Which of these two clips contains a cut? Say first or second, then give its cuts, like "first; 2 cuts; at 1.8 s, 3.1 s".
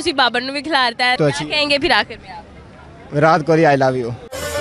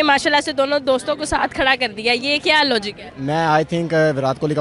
first; 1 cut; at 1.2 s